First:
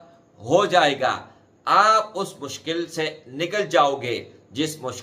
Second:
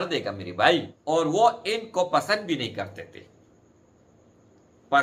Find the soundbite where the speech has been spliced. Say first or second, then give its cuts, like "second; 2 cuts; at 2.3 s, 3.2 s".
second; 1 cut; at 0.9 s